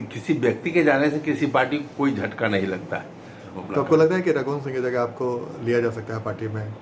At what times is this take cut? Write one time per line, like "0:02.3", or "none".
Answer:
0:03.5